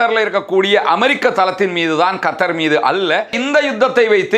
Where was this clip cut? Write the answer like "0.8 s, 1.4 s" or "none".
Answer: 3.4 s